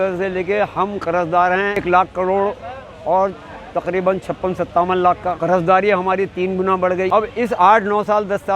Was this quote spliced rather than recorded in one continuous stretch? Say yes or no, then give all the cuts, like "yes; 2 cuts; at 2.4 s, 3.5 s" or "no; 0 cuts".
yes; 3 cuts; at 1.8 s, 5.4 s, 7.1 s